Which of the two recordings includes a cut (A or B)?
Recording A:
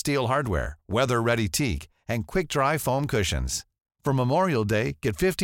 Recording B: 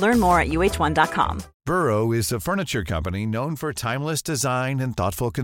B